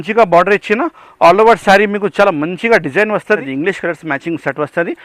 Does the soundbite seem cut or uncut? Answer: cut